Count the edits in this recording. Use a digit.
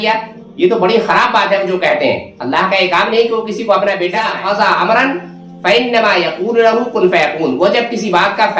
1